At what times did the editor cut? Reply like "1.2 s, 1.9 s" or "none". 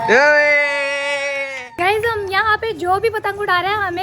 1.9 s